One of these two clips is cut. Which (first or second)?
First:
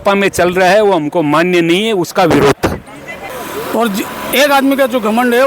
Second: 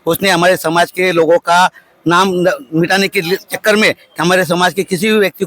first